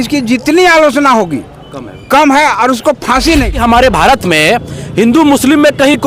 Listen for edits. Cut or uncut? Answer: cut